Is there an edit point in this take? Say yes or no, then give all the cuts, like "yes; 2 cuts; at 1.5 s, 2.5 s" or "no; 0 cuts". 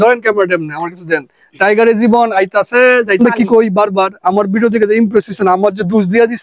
yes; 1 cut; at 3.2 s